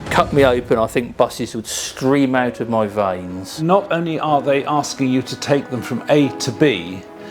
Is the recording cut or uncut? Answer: cut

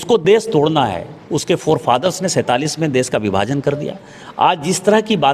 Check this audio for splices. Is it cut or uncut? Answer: uncut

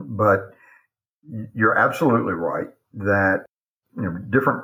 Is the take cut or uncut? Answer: cut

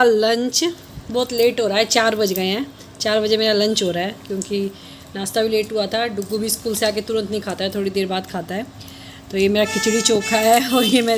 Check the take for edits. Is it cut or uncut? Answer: uncut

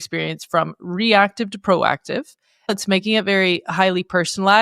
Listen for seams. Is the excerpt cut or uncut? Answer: cut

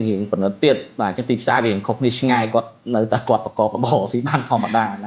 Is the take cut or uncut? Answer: uncut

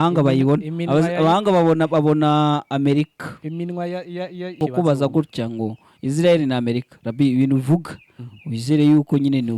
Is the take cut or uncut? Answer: cut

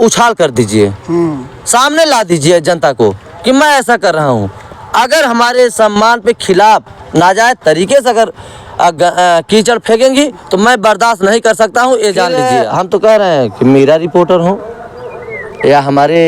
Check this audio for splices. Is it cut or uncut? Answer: cut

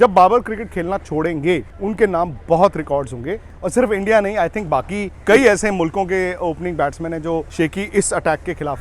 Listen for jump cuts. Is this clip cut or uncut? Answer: cut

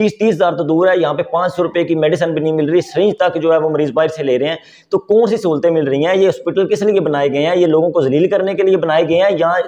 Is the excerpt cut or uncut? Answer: uncut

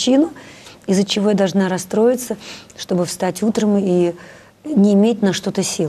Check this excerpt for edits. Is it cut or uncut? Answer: uncut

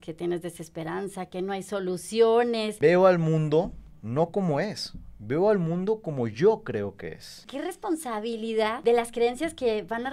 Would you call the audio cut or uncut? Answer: cut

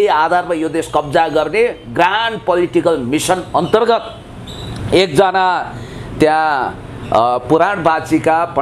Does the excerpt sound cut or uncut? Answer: uncut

